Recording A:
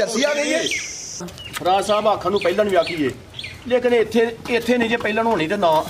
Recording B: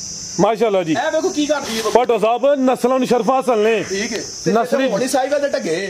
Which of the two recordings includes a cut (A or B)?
A